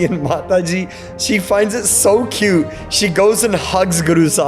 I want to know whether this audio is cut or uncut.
cut